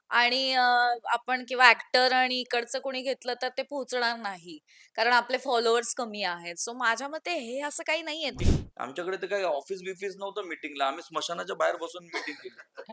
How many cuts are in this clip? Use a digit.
1